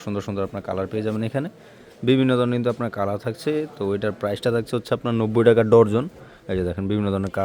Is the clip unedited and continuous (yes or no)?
yes